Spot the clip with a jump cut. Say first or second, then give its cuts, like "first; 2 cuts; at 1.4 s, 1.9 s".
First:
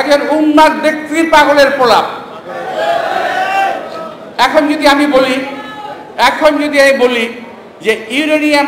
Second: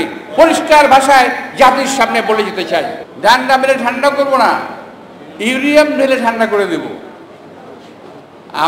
second; 1 cut; at 3.0 s